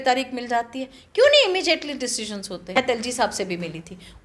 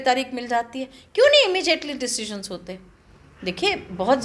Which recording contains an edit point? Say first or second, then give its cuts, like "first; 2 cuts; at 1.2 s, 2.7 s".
first; 1 cut; at 2.8 s